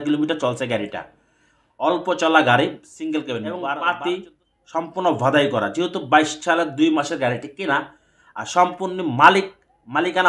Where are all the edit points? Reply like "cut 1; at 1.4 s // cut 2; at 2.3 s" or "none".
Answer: cut 1; at 3.4 s

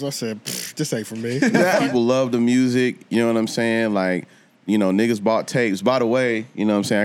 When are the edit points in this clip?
cut 1; at 1.8 s

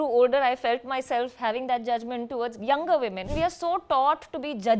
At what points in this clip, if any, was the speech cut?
cut 1; at 3.2 s

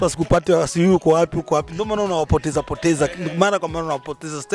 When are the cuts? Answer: none

